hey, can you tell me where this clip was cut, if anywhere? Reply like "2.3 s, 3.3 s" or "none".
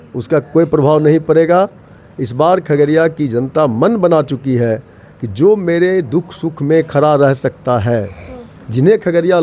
none